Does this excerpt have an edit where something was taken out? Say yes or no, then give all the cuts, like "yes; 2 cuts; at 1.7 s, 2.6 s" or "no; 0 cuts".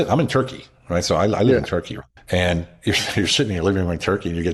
no; 0 cuts